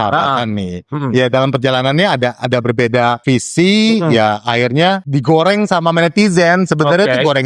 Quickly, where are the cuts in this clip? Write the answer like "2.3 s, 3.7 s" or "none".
3.2 s, 5.1 s